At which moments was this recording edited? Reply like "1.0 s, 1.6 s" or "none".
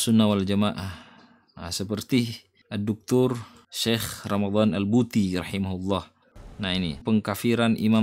7.0 s